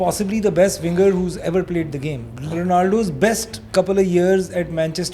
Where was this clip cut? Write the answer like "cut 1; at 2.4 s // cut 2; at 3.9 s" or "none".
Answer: cut 1; at 2.5 s